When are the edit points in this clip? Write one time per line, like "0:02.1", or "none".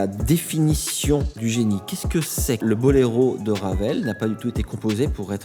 0:01.3
0:02.6